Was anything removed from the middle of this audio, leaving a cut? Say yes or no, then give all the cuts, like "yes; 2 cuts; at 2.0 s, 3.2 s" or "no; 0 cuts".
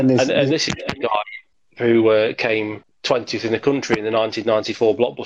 no; 0 cuts